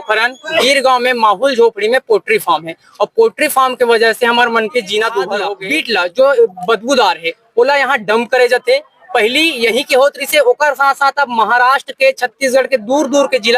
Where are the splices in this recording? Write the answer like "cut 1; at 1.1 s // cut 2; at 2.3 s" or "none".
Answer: cut 1; at 5.6 s